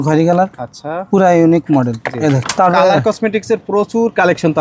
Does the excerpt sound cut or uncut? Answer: cut